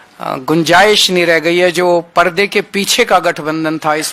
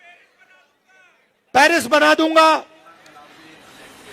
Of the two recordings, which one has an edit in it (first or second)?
second